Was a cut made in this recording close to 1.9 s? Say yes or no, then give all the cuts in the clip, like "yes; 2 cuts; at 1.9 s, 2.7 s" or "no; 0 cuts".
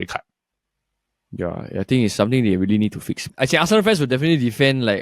no; 1 cut; at 3.2 s